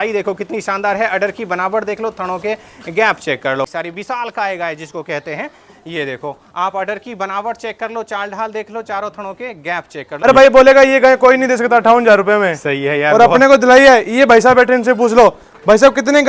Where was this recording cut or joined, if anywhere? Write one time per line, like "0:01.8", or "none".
0:03.9
0:10.2